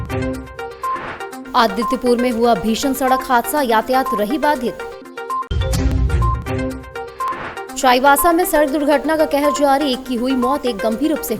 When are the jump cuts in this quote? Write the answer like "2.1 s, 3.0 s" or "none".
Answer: 1.3 s